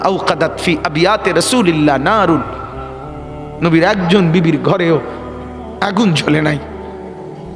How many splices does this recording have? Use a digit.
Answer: 1